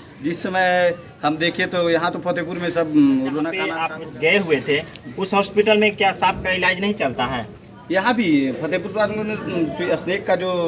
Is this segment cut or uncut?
cut